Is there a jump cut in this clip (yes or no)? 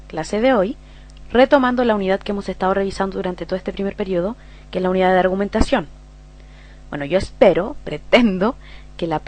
no